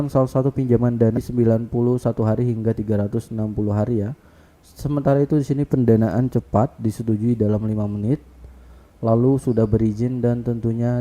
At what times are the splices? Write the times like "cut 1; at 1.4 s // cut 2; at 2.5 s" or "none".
cut 1; at 1.2 s